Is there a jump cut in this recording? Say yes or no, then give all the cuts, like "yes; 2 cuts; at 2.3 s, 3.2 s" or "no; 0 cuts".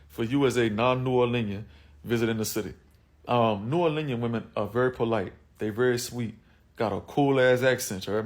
no; 0 cuts